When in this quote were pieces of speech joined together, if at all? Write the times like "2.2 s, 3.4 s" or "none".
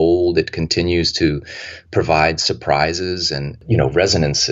3.6 s

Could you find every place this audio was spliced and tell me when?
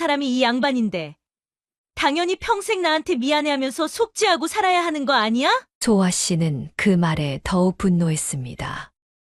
none

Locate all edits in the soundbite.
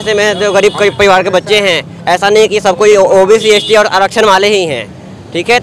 none

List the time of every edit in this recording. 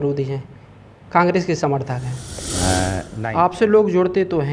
3.1 s

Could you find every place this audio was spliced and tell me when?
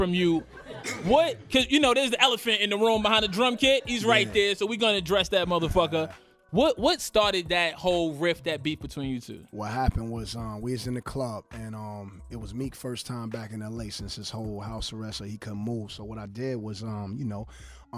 9.7 s

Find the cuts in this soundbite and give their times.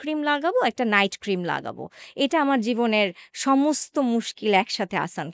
none

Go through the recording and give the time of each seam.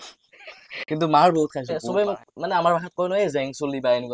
1.7 s

